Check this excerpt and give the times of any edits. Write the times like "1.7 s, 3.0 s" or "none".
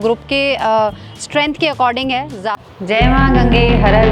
2.4 s